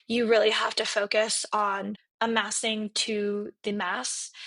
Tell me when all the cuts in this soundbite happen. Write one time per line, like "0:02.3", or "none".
0:02.0